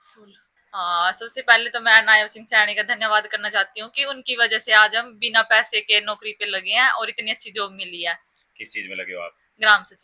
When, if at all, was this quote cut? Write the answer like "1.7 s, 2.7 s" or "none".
none